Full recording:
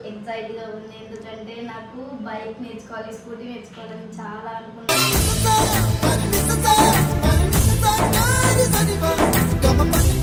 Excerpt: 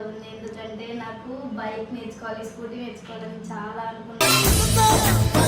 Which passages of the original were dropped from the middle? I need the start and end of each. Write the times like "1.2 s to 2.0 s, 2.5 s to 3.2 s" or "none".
none

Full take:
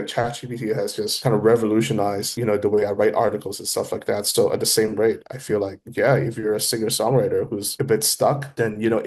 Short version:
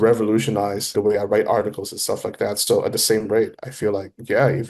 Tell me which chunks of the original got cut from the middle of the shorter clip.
2.3 s to 2.6 s

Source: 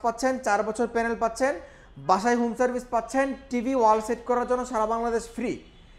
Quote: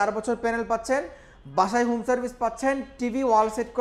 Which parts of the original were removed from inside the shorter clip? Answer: none

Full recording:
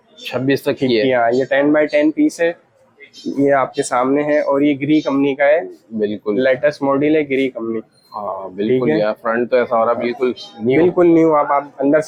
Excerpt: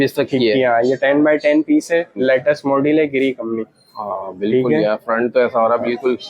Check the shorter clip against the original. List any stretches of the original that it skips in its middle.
2.6 s to 6.3 s

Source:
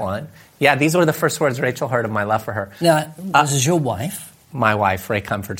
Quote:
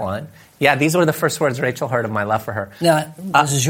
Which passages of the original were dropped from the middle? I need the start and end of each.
none

